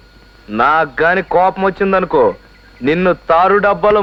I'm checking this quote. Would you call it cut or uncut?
uncut